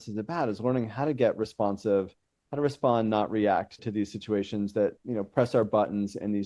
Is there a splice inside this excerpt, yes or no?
yes